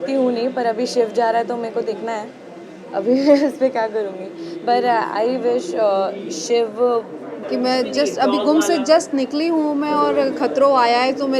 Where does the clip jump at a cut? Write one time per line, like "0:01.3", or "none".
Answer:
0:07.3